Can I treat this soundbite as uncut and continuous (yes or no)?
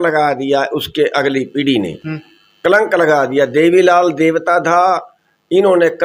yes